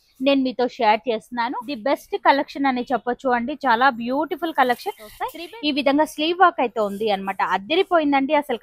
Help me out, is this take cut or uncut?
cut